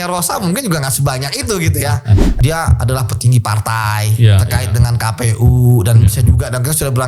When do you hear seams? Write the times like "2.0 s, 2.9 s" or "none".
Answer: 2.3 s